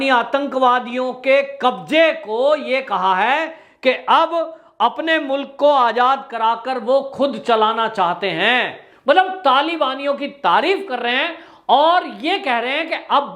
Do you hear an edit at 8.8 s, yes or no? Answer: yes